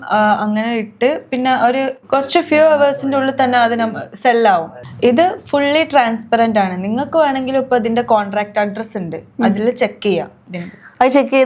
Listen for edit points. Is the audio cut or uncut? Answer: cut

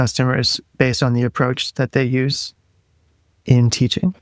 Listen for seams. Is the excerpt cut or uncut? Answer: uncut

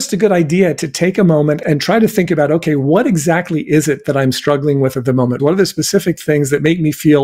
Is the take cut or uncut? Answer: uncut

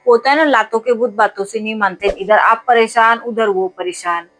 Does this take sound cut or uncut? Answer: cut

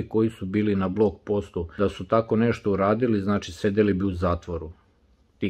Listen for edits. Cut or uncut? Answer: cut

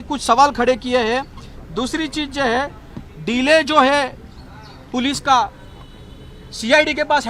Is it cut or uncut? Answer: uncut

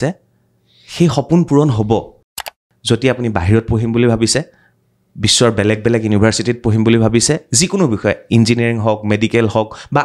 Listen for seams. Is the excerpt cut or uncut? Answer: cut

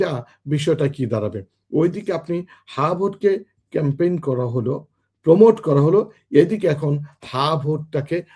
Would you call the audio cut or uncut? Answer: uncut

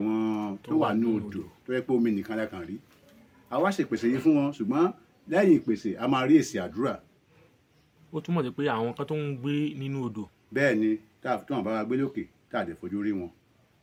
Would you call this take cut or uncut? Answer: uncut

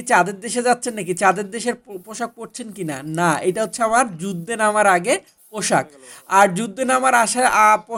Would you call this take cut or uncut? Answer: uncut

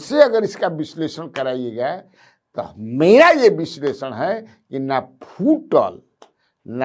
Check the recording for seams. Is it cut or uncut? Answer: uncut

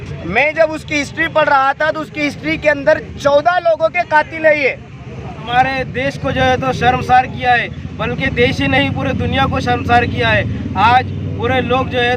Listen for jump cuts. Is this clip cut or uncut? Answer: cut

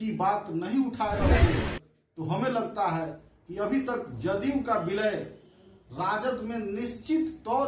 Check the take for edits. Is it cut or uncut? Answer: uncut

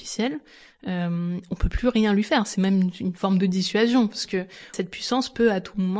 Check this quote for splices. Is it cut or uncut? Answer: cut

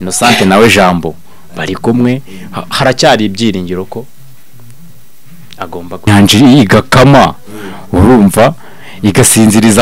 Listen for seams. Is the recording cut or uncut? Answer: cut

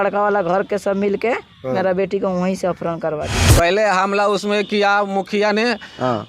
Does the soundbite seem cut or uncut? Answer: cut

